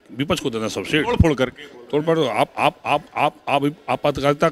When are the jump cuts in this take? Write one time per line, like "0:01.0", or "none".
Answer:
none